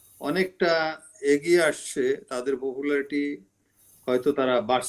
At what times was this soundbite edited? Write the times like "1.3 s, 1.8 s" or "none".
none